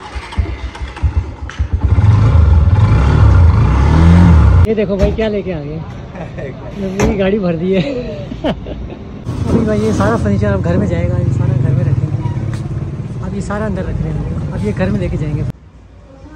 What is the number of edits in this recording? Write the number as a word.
three